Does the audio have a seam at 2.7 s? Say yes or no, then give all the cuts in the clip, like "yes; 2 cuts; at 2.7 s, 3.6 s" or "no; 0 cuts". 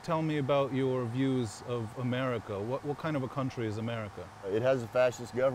no; 1 cut; at 4.5 s